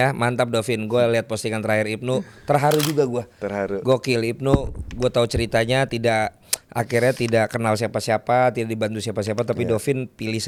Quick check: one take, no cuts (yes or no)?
yes